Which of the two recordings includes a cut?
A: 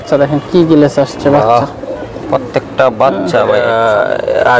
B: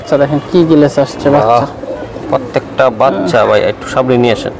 A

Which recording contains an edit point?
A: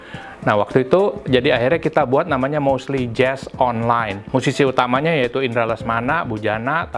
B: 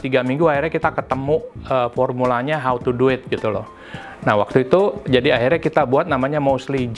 A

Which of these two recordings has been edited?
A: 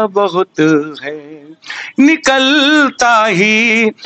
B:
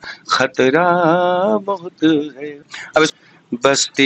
B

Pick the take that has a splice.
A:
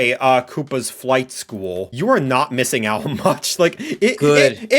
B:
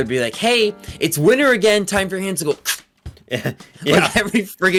A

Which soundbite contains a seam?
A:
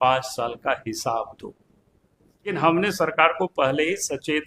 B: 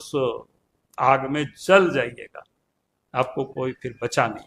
A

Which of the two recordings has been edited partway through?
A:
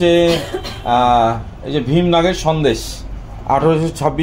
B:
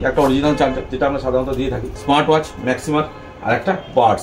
B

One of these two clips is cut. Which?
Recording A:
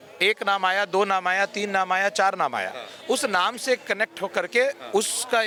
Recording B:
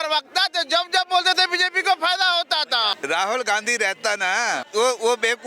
B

